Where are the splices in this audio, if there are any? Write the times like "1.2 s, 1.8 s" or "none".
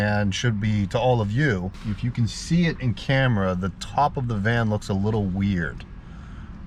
none